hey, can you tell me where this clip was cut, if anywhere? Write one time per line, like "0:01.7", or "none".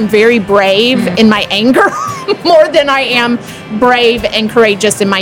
0:01.1